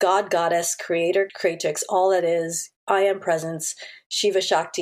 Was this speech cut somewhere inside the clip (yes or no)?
yes